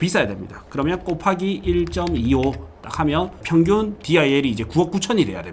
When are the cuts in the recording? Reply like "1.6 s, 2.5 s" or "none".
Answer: 3.4 s